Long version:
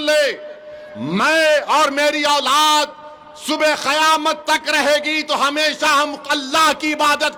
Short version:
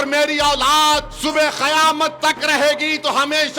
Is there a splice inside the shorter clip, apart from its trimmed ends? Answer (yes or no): yes